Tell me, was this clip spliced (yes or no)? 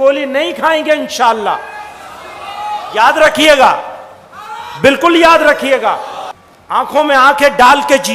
yes